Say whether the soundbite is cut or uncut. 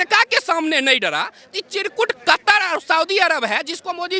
uncut